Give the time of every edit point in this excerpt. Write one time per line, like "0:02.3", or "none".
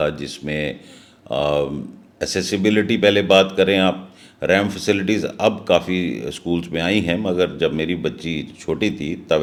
none